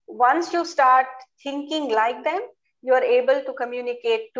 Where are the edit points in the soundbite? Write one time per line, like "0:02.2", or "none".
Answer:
none